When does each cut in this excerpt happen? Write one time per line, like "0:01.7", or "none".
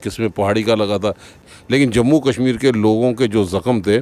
0:01.5